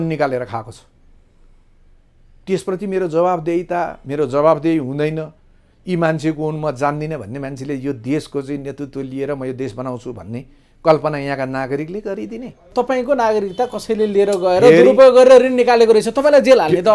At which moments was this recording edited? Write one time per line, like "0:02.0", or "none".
0:12.6

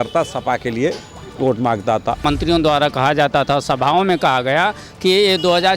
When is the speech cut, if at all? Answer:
0:02.2

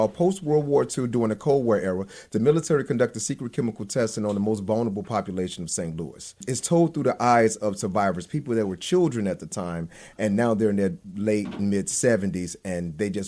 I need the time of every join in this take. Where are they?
none

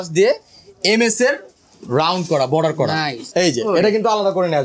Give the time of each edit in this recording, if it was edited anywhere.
0:03.2

